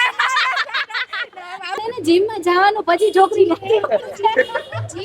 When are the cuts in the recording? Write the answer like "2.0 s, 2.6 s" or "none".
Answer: 1.8 s